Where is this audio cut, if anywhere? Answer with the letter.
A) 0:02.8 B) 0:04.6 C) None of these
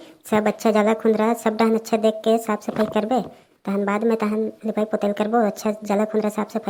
C